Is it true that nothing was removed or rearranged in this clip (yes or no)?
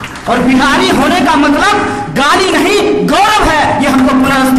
yes